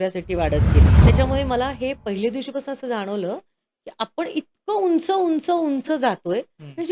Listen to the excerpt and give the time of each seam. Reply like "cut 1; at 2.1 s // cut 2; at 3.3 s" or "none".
cut 1; at 0.9 s